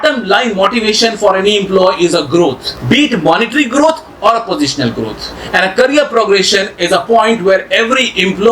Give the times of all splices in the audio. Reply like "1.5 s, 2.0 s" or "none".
none